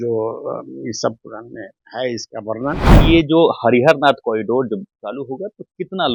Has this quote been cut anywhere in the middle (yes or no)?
yes